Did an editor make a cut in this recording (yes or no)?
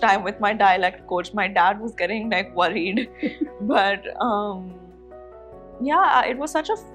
no